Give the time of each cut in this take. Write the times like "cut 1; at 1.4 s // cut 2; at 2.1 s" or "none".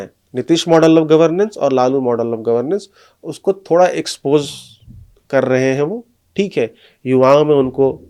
none